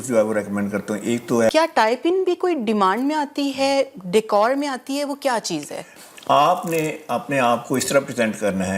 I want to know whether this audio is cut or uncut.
cut